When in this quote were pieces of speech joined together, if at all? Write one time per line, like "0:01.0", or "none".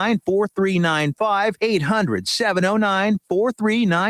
0:01.5